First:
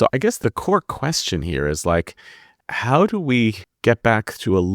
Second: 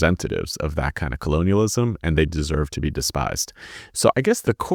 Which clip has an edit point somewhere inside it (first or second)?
first